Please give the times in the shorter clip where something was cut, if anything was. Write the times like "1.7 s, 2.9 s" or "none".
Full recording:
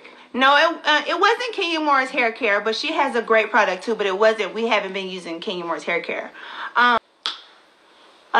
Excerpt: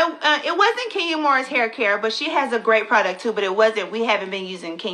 none